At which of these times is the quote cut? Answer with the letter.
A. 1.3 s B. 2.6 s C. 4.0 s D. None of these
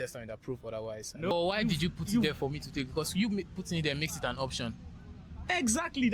A